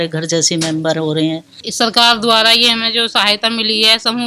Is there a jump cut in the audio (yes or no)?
yes